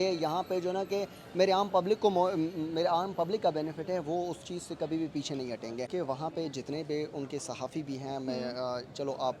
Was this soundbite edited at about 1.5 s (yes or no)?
no